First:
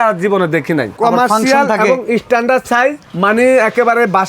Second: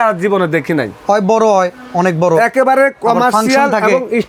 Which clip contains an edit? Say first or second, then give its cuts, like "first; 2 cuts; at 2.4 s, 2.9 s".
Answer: first; 1 cut; at 0.9 s